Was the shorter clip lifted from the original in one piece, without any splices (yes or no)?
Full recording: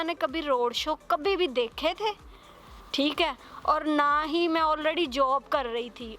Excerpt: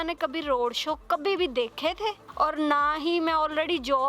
no